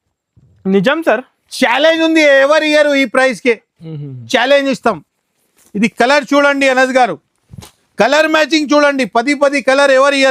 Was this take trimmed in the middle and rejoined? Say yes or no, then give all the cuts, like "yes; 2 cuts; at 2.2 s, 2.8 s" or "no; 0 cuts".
no; 0 cuts